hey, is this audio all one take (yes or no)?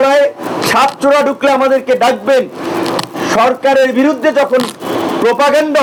yes